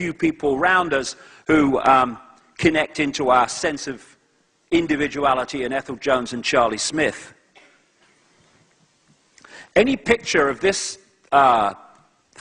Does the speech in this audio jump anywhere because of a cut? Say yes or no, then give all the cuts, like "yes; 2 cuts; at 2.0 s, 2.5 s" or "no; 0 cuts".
yes; 1 cut; at 8.4 s